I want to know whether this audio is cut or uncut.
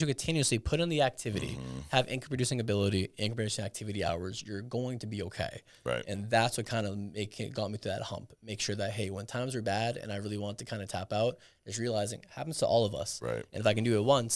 uncut